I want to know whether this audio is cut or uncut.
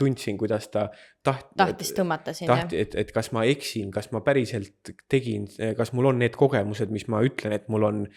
uncut